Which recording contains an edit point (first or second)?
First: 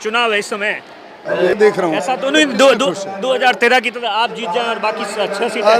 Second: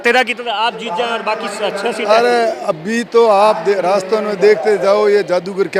first